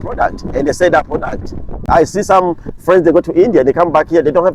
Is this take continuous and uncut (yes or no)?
no